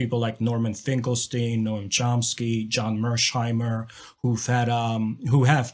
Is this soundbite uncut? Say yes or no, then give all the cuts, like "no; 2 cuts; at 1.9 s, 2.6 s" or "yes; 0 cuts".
yes; 0 cuts